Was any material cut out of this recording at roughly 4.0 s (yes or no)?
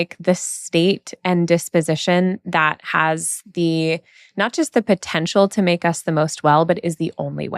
no